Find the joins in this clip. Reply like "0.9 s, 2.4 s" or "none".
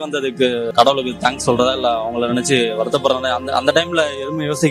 none